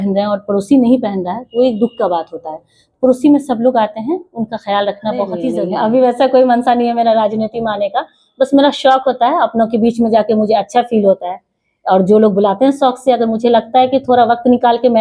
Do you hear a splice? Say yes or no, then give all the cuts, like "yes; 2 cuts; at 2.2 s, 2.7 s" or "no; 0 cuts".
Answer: yes; 1 cut; at 5.5 s